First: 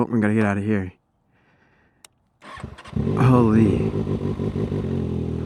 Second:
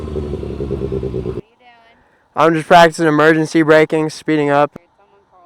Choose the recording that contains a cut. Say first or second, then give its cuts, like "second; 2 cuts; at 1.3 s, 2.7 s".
second; 2 cuts; at 1.4 s, 4.7 s